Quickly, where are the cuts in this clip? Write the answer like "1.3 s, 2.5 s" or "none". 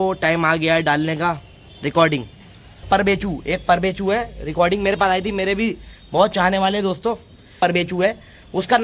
2.8 s, 7.6 s

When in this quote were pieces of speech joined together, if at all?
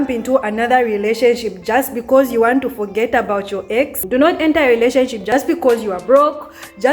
4.0 s, 5.3 s

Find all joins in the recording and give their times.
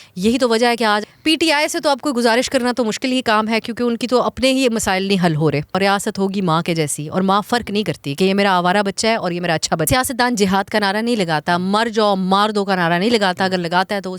1.0 s, 5.8 s, 9.8 s

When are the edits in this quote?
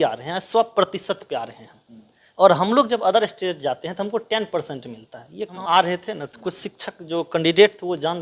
5.6 s

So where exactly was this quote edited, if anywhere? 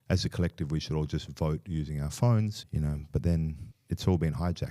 2.6 s, 3.7 s

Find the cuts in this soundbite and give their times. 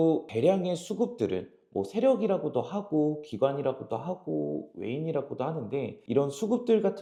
none

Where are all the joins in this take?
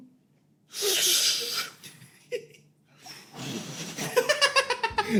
none

